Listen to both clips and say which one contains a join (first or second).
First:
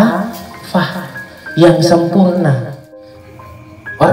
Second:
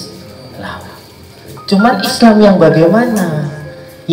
first